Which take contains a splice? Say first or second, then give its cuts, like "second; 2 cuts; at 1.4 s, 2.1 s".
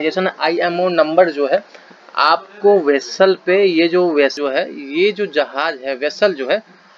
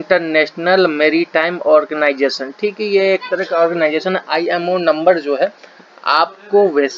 first; 1 cut; at 4.4 s